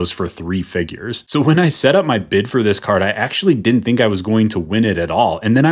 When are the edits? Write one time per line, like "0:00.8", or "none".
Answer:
0:01.2